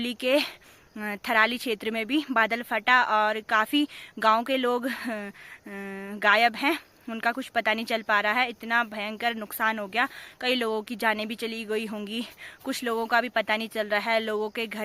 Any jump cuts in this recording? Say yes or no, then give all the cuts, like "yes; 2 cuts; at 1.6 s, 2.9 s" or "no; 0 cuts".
no; 0 cuts